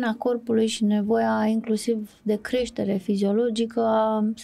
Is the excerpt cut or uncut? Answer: uncut